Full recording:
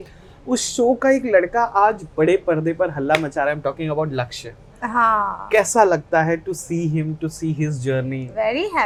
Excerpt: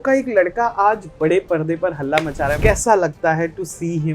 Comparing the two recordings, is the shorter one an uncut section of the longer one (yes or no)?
no